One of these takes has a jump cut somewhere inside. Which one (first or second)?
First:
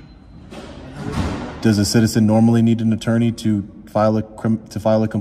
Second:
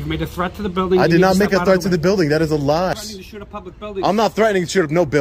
second